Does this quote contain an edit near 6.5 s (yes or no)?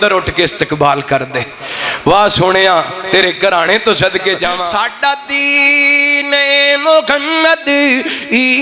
no